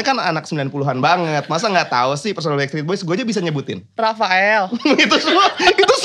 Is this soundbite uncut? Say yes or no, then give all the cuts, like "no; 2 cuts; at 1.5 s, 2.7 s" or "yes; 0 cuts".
yes; 0 cuts